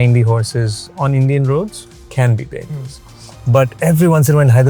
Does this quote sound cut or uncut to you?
uncut